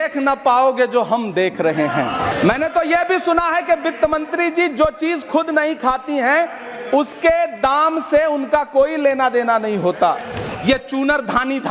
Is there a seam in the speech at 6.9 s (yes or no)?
no